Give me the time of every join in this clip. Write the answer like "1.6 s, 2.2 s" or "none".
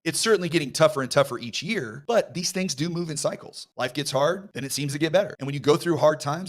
none